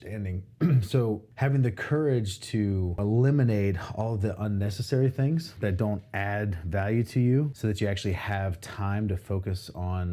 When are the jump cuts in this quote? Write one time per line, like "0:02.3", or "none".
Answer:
0:01.3
0:03.0
0:05.5
0:07.5